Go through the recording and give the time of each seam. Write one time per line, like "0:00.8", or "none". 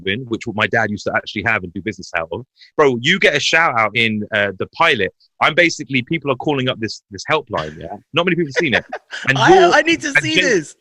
0:02.6
0:03.9